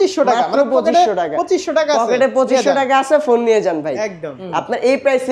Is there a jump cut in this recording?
yes; 1 cut; at 4.3 s

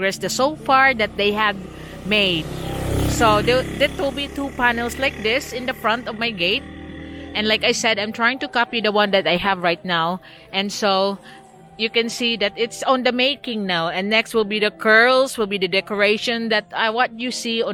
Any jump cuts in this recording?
no; 0 cuts

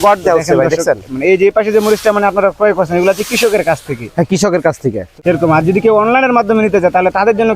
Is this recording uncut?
no; 1 cut; at 5.1 s

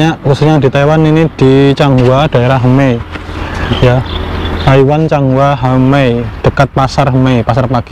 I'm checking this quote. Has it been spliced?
no; 0 cuts

